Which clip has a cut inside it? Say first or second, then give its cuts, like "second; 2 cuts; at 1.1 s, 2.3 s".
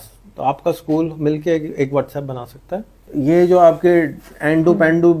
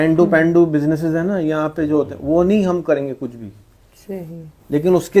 first; 1 cut; at 3.1 s